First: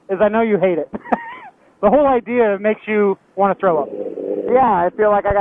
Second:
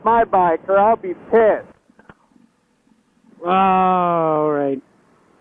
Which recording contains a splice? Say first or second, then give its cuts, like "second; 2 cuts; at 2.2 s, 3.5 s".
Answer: second; 1 cut; at 1.7 s